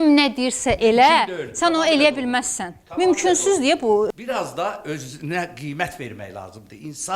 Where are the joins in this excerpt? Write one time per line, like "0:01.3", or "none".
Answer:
0:04.1